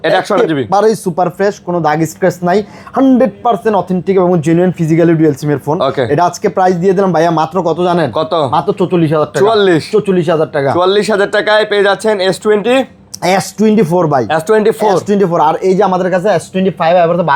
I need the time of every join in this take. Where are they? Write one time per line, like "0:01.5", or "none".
none